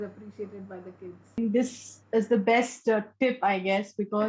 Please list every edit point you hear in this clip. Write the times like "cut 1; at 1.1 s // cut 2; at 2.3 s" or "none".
cut 1; at 1.4 s